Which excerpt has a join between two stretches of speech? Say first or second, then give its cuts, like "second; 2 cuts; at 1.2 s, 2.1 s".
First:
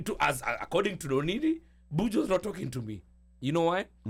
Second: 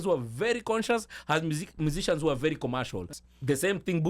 second; 1 cut; at 3.1 s